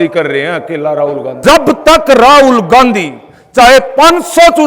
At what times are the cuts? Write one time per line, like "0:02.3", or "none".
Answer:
0:01.3

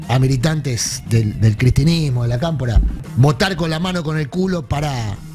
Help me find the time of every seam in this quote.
0:03.0

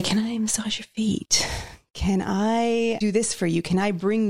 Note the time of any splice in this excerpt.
0:03.0

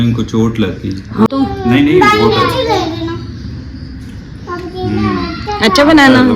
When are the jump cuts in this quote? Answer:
0:01.3

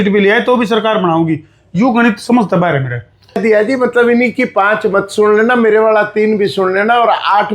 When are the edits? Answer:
0:03.4

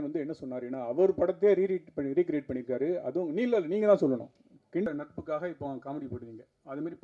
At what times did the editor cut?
0:04.9

